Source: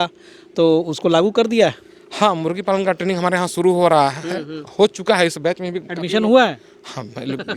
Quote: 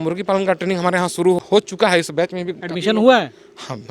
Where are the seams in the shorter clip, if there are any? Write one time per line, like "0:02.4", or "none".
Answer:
0:01.4